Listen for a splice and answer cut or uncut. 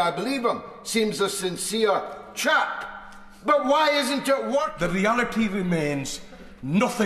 cut